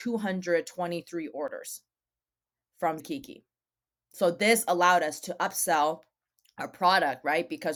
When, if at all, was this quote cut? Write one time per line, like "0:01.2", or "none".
none